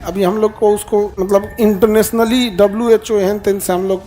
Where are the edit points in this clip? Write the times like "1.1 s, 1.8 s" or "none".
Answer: 1.2 s